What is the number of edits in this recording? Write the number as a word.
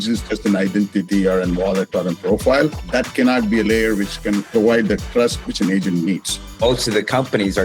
three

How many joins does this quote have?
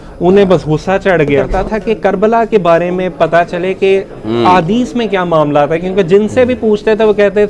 one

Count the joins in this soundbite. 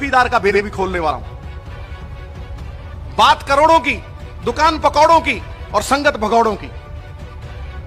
one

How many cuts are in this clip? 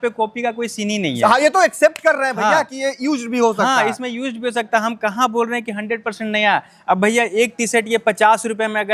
zero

